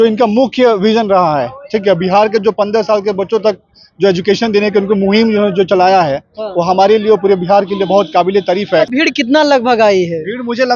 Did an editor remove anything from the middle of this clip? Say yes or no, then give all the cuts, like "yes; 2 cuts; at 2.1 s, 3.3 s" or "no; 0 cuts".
yes; 1 cut; at 8.9 s